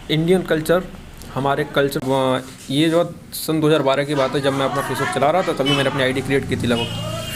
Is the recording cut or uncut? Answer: cut